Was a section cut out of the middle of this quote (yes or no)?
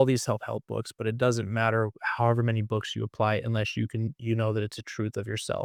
no